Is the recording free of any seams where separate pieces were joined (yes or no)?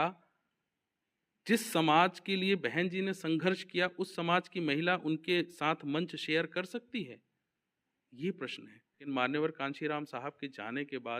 no